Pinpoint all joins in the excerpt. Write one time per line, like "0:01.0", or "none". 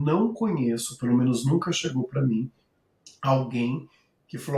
none